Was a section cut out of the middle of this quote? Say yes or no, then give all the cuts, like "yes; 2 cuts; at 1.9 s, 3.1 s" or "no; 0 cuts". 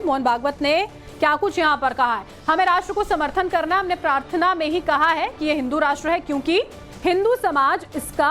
yes; 1 cut; at 1.7 s